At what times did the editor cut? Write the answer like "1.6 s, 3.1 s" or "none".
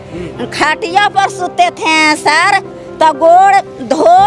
none